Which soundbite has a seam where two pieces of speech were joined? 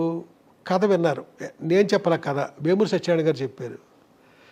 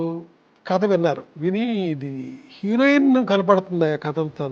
second; 1 cut; at 1.3 s

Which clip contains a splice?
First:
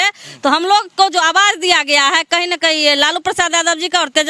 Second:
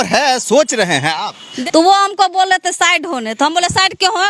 second; 1 cut; at 1.5 s

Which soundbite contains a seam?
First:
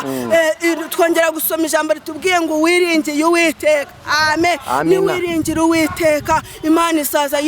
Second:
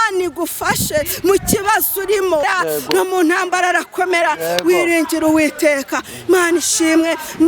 second; 1 cut; at 2.4 s

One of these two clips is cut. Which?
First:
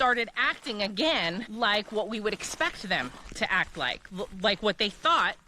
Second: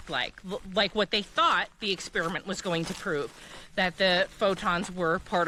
first; 1 cut; at 1.5 s

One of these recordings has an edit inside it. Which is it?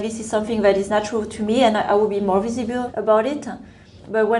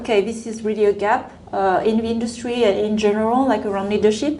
first; 2 cuts; at 0.9 s, 2.9 s

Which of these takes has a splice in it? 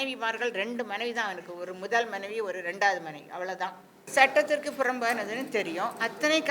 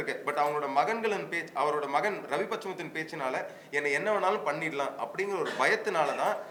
first; 1 cut; at 4.0 s

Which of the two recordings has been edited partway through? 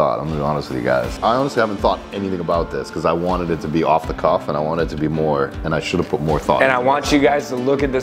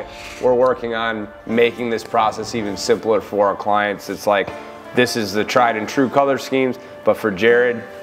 first; 1 cut; at 1.1 s

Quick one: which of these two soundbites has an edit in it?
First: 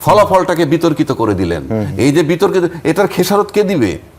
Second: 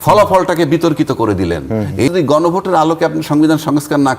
second; 1 cut; at 2.1 s

